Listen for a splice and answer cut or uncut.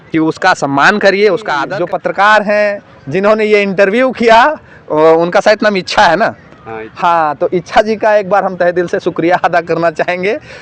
cut